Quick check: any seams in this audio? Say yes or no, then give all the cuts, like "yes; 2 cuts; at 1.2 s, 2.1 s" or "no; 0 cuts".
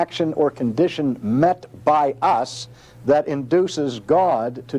no; 0 cuts